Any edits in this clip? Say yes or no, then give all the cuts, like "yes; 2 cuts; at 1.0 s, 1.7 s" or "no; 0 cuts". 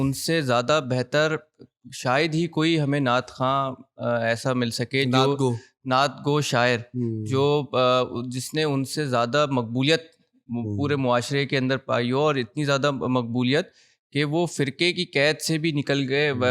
no; 0 cuts